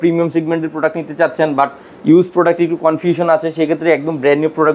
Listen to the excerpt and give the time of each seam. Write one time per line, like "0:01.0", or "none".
none